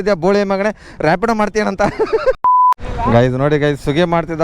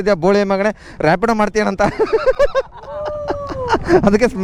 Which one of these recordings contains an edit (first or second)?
first